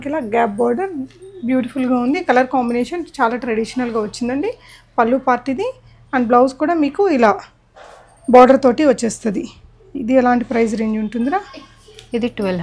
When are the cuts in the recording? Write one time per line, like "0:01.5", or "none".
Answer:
none